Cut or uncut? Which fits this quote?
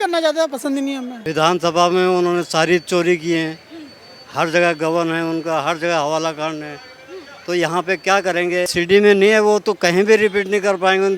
cut